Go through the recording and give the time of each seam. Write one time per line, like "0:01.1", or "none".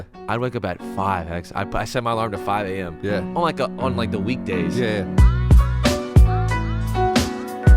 0:05.1